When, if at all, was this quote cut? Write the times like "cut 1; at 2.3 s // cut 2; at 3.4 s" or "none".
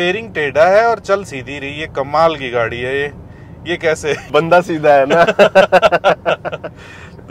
none